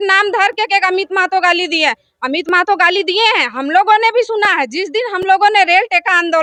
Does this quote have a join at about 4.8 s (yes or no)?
no